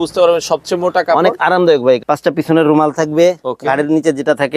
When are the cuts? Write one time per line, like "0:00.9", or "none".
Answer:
0:02.0